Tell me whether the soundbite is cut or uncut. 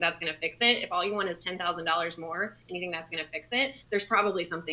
cut